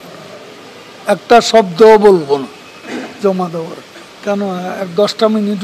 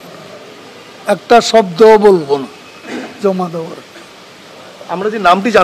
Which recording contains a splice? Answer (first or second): first